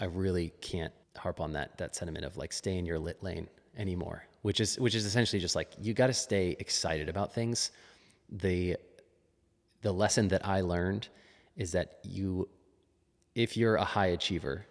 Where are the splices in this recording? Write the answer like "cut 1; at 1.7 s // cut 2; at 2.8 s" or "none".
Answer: cut 1; at 1.0 s